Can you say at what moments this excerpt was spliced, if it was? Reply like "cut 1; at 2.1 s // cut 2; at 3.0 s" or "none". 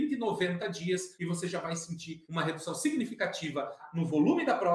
cut 1; at 2.2 s // cut 2; at 3.8 s